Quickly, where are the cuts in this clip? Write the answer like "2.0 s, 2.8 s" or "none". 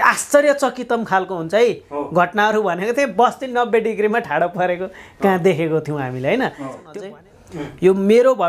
6.8 s